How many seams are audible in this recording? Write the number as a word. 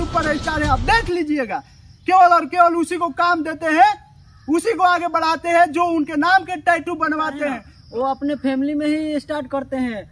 one